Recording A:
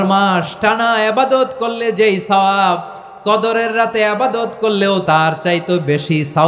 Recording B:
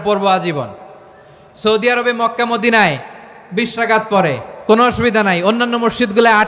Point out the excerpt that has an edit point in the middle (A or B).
A